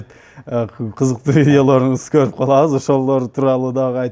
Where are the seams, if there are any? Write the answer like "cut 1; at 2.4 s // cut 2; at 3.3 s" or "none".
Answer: none